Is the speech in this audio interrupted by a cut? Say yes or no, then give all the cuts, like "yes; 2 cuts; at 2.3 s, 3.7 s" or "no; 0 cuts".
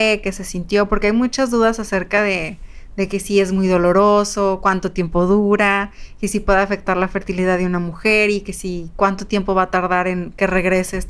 no; 0 cuts